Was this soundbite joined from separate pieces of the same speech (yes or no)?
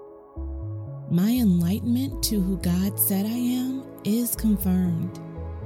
yes